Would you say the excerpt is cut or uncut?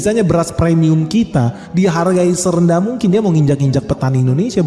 uncut